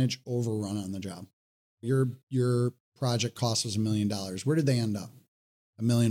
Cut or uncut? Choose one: cut